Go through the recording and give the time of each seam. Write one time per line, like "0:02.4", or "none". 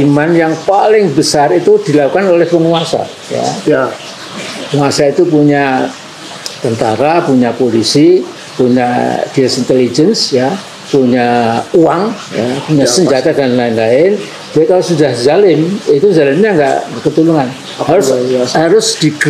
none